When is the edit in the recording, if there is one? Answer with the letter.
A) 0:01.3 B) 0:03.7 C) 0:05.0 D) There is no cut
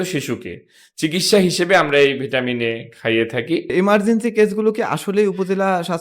B